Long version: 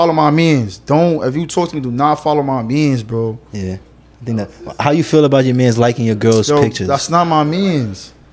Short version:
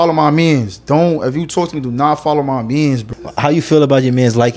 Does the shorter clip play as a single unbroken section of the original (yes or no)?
no